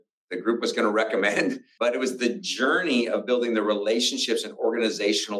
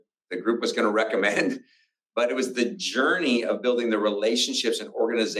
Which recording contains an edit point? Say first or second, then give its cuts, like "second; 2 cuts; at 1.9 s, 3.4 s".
first; 1 cut; at 1.7 s